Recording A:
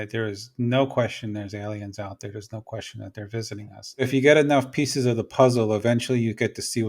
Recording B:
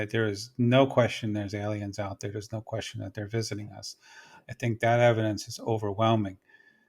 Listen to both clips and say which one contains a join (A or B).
A